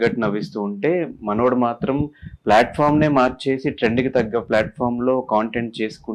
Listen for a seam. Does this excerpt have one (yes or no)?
no